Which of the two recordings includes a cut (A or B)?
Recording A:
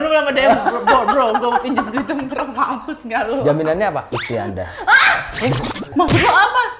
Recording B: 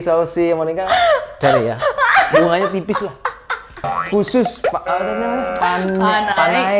A